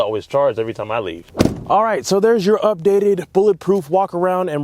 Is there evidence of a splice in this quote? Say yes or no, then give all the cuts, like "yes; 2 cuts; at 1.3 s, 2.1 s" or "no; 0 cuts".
no; 0 cuts